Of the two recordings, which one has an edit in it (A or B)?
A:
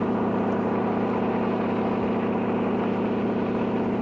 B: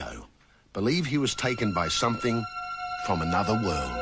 B